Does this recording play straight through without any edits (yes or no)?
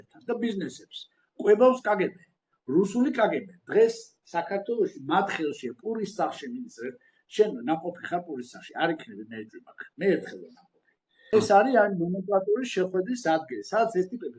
no